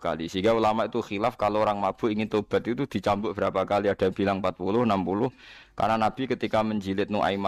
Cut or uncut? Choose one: uncut